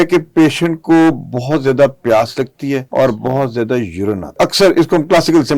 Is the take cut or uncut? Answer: cut